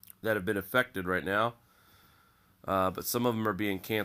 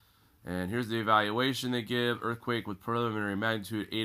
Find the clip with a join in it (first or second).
first